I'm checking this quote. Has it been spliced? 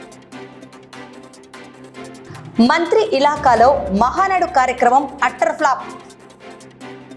no; 0 cuts

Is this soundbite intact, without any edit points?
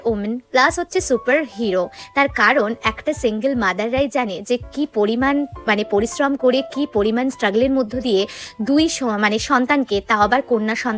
yes; 0 cuts

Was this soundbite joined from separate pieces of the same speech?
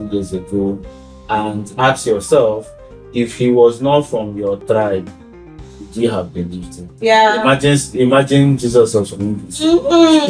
yes; 1 cut; at 6.9 s

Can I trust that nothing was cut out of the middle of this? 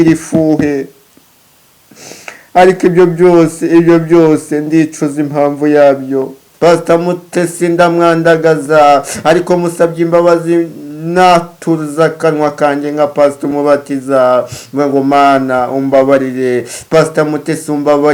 no; 1 cut; at 6.4 s

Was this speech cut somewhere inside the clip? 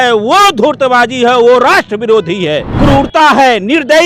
yes; 1 cut; at 2.7 s

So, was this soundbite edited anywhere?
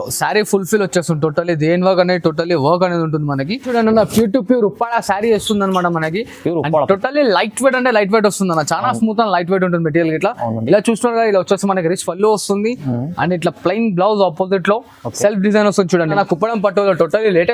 yes; 2 cuts; at 3.6 s, 16.1 s

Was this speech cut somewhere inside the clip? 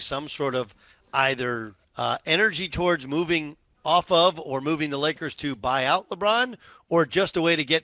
yes; 1 cut; at 1.8 s

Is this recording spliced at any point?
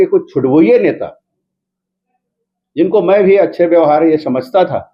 no; 0 cuts

